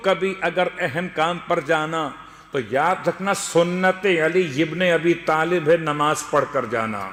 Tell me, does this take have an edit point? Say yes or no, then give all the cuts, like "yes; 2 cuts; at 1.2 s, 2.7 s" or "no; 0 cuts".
no; 0 cuts